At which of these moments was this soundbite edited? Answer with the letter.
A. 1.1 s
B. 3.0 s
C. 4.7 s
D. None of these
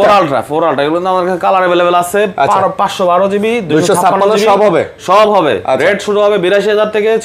D